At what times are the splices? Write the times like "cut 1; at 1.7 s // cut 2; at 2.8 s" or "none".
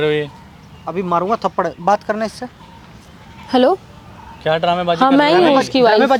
none